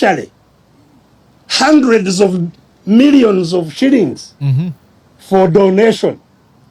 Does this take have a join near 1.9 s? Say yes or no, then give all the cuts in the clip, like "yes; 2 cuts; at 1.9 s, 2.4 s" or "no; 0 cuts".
no; 0 cuts